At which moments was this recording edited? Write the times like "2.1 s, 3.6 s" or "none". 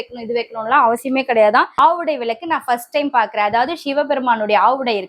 1.8 s